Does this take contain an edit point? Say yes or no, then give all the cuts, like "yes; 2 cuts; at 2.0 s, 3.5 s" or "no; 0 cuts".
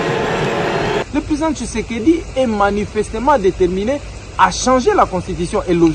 yes; 1 cut; at 1.0 s